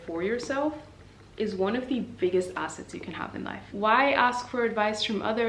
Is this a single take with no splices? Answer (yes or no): no